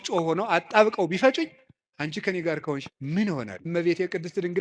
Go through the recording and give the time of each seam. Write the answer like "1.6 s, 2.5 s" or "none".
3.6 s